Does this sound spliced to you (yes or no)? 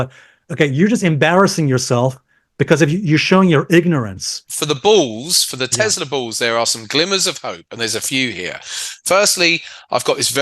yes